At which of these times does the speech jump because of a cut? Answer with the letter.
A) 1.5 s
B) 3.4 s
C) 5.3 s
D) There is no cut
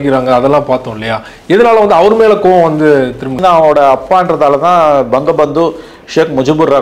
B